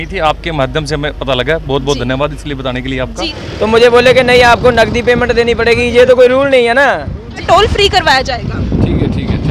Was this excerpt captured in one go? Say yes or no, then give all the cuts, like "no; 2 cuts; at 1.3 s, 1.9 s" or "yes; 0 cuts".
no; 2 cuts; at 3.4 s, 7.4 s